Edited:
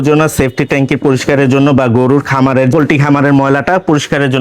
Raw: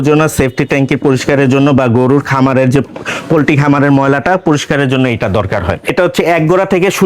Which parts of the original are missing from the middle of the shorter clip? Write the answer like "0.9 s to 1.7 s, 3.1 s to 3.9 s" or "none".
2.7 s to 3.3 s